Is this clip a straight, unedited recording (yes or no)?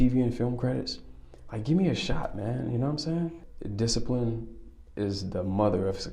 no